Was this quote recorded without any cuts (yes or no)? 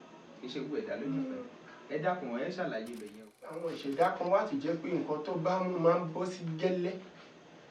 no